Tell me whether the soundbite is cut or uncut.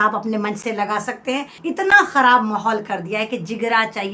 cut